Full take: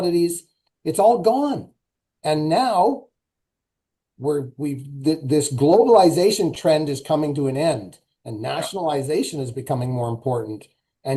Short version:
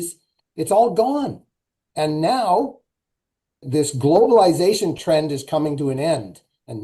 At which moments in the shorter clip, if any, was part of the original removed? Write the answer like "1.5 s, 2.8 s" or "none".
3.7 s